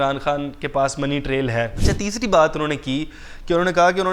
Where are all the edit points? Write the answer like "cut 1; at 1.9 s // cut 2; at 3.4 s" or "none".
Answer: cut 1; at 1.8 s